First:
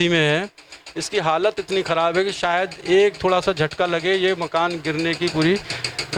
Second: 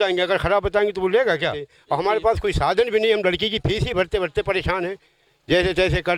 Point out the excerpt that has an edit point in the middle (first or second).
second